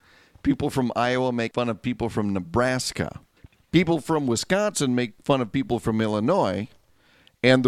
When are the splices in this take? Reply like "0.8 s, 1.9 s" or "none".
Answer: 3.4 s